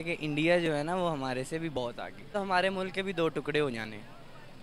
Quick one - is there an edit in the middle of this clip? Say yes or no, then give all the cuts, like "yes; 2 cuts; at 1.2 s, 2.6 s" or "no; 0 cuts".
yes; 1 cut; at 2.3 s